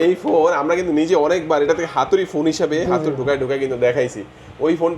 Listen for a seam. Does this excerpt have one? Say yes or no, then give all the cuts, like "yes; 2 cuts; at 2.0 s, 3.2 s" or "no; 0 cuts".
no; 0 cuts